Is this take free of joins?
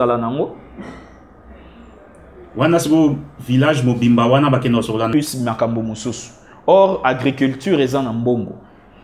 no; 1 cut; at 5.1 s

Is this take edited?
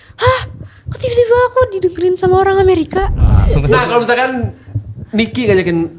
yes; 1 cut; at 3.4 s

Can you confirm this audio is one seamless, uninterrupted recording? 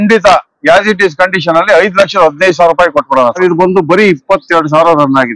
no; 1 cut; at 3.4 s

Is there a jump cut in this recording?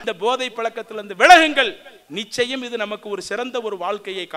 no; 0 cuts

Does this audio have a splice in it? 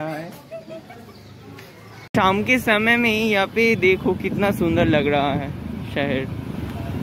yes; 1 cut; at 2.1 s

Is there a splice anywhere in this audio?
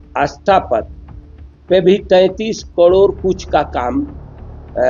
no; 0 cuts

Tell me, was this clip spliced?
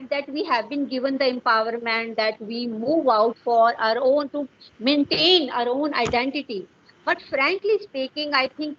no; 0 cuts

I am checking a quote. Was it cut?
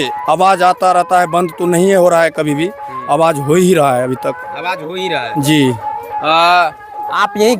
no; 0 cuts

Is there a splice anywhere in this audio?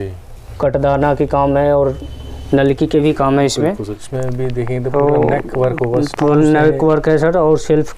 yes; 1 cut; at 3.9 s

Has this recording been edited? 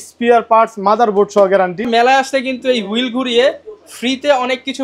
yes; 1 cut; at 1.9 s

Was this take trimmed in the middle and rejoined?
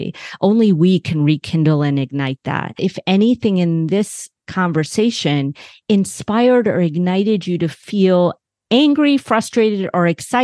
yes; 1 cut; at 2.8 s

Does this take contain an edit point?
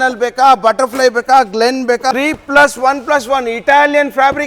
yes; 1 cut; at 2.1 s

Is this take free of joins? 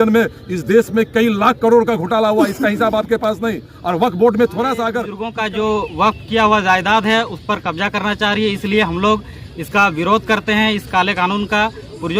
no; 1 cut; at 5.2 s

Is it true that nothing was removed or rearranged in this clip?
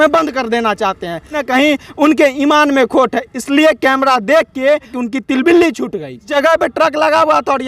no; 3 cuts; at 1.4 s, 4.9 s, 6.3 s

